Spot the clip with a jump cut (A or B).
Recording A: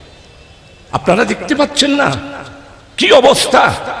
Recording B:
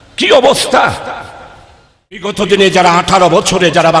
B